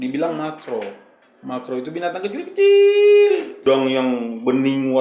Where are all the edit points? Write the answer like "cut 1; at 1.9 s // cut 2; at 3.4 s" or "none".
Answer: cut 1; at 3.6 s